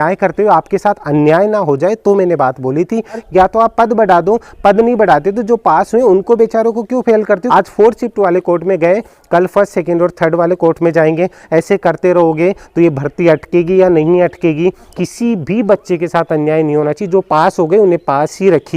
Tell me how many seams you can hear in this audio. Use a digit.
3